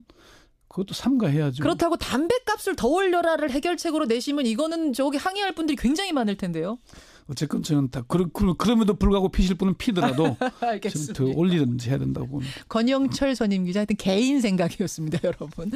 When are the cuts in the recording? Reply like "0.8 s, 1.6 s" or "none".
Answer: 6.4 s

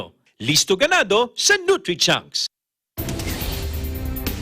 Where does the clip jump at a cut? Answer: 2.7 s

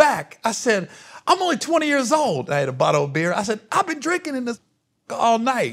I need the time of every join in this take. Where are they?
none

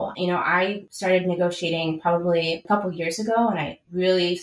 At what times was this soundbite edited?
0.9 s, 2.6 s

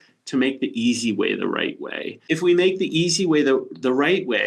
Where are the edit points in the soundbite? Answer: 2.2 s

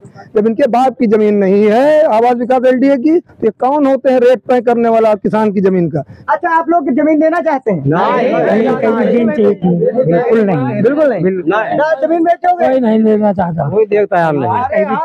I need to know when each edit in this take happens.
6.1 s

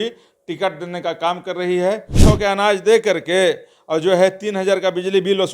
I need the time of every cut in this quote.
2.2 s

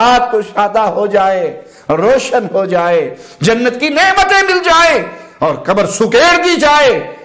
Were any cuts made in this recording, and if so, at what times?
none

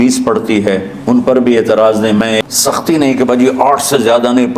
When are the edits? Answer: 2.4 s

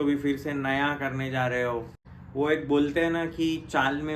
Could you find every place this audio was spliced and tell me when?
2.0 s

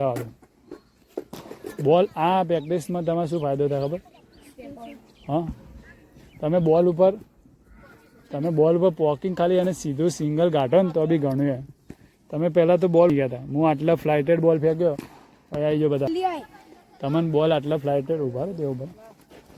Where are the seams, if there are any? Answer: 16.1 s

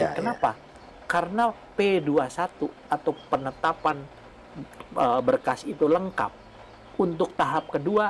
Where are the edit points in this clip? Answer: none

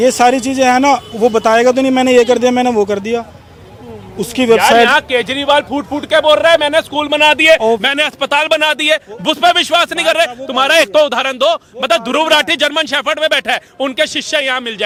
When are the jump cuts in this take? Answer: none

